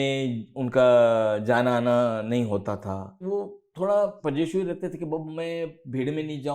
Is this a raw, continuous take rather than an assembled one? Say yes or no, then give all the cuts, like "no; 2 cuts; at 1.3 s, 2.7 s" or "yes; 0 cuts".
no; 2 cuts; at 3.2 s, 4.2 s